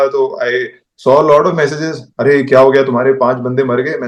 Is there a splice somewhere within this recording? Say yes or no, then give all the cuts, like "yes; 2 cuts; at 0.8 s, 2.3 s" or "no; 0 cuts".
no; 0 cuts